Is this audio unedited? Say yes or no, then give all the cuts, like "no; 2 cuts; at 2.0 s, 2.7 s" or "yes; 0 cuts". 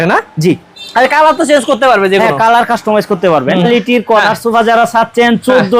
no; 1 cut; at 3.6 s